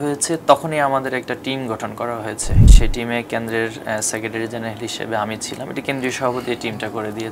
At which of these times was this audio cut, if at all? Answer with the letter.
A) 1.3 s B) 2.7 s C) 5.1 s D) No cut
B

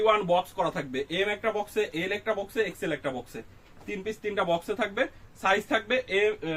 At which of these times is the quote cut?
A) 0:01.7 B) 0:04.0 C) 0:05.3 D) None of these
D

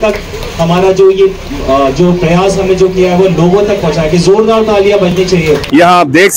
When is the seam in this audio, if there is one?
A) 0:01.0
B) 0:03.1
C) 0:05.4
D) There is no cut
C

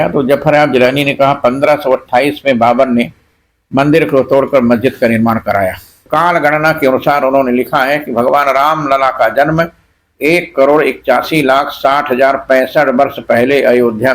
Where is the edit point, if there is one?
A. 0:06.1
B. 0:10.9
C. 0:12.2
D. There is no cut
A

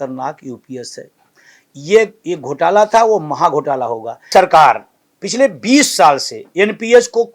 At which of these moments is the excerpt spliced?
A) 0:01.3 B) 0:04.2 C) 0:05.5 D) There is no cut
B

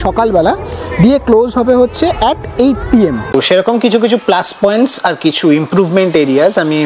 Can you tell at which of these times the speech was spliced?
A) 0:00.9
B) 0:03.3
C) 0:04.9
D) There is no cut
B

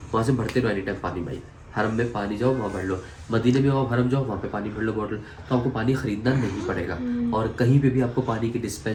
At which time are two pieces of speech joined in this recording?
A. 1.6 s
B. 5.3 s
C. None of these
C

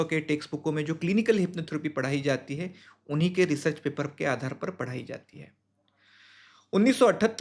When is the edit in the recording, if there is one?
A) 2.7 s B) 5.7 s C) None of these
C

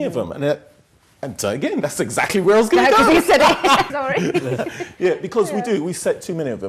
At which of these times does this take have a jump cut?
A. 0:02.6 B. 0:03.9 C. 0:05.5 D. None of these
B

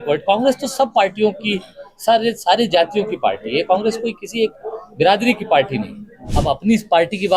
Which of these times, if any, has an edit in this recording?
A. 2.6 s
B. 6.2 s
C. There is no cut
B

